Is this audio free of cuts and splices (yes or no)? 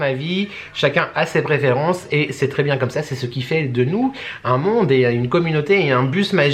yes